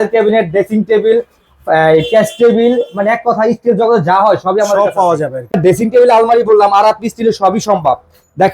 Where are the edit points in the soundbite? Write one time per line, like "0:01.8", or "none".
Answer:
0:05.6